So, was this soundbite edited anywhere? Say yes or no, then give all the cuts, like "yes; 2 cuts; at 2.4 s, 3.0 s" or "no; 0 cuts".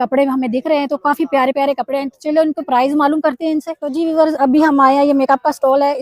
yes; 1 cut; at 3.8 s